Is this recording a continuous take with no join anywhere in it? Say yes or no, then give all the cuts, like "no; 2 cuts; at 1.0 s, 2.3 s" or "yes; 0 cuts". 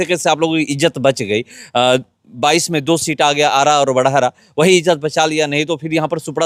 yes; 0 cuts